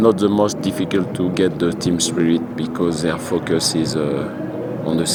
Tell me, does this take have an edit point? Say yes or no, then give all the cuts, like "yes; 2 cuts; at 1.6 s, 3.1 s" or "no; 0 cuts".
no; 0 cuts